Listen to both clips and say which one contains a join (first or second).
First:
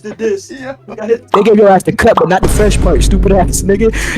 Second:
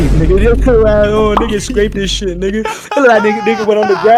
first